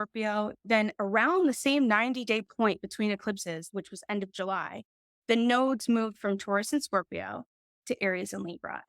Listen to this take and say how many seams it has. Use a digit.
1